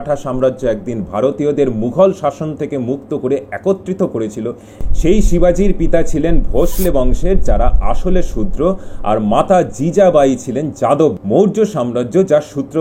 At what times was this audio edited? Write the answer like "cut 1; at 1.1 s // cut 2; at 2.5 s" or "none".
cut 1; at 11.2 s

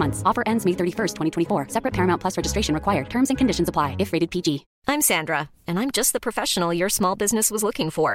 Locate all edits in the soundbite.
cut 1; at 4.7 s

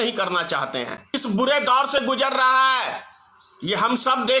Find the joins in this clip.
cut 1; at 1.0 s

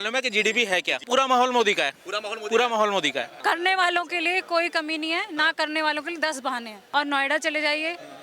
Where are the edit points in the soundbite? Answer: cut 1; at 1.0 s // cut 2; at 3.3 s // cut 3; at 6.8 s

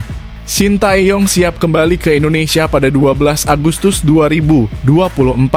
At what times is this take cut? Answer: none

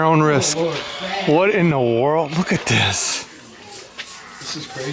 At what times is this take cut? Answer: none

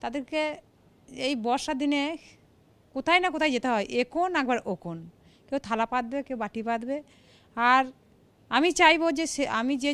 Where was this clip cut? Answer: none

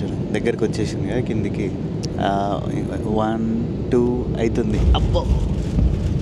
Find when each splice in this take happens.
none

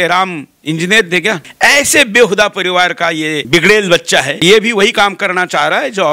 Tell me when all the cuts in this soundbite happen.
cut 1; at 1.5 s // cut 2; at 3.4 s // cut 3; at 4.4 s

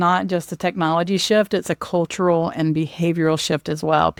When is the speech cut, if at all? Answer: none

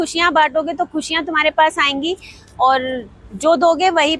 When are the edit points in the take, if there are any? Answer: none

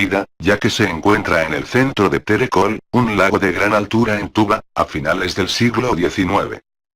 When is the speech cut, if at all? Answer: cut 1; at 3.9 s

